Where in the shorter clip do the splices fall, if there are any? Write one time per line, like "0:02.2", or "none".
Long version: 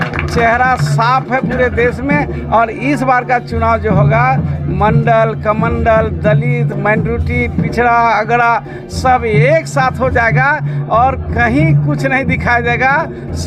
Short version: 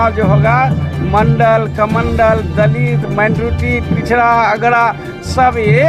none